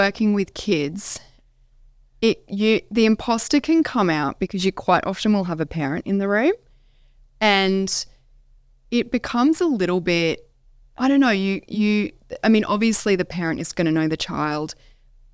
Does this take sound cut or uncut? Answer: uncut